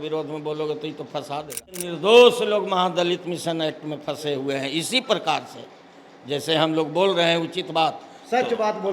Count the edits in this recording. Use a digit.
1